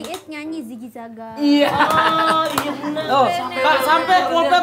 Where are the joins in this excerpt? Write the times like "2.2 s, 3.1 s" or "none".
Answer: 3.0 s